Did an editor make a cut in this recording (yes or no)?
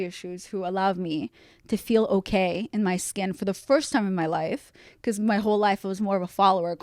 no